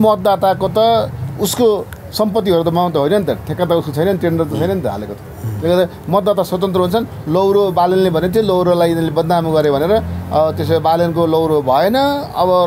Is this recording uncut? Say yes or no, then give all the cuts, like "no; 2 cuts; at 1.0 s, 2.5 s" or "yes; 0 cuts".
yes; 0 cuts